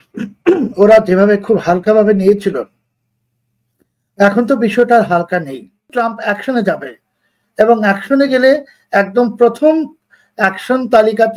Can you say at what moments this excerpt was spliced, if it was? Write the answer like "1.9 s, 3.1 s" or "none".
5.9 s